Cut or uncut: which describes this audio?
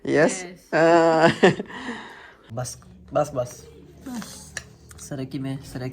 cut